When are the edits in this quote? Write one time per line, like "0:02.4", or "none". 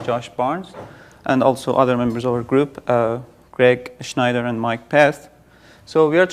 0:04.8